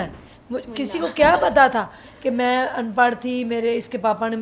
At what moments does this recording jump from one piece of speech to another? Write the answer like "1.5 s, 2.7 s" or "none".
none